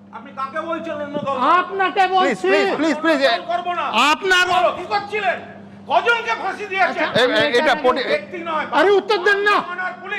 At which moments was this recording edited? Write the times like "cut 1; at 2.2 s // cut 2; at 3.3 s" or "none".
cut 1; at 4.5 s // cut 2; at 8.1 s

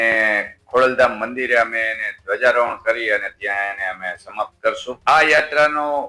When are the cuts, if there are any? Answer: cut 1; at 5.0 s

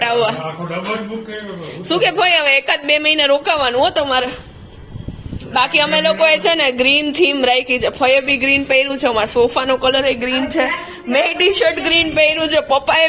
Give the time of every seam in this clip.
none

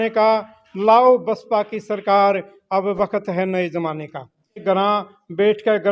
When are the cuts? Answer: cut 1; at 4.6 s

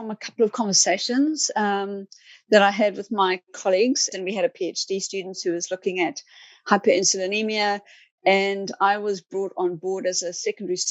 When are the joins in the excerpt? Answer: cut 1; at 4.1 s

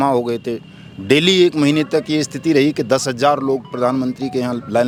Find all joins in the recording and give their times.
none

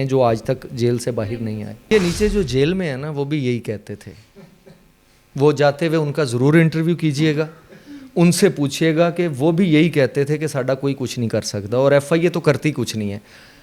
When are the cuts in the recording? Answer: cut 1; at 1.9 s

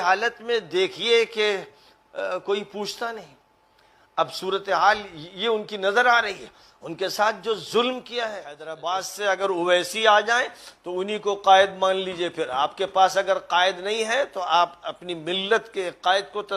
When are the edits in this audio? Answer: cut 1; at 8.7 s

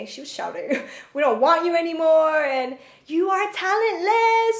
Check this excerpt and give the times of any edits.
none

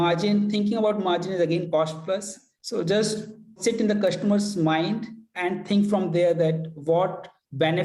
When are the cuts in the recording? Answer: cut 1; at 1.7 s // cut 2; at 3.5 s

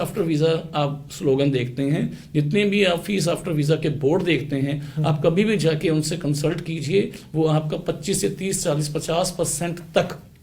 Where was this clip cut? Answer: none

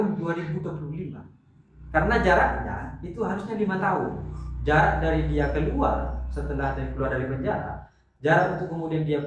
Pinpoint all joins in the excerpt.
none

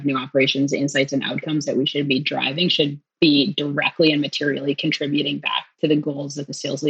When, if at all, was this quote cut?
cut 1; at 3.1 s

